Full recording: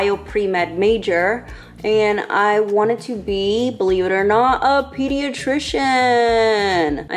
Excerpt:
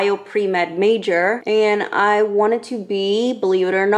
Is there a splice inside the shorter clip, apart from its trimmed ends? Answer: yes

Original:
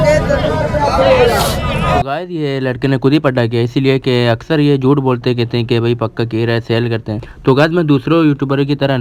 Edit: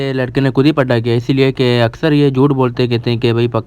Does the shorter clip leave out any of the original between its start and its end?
no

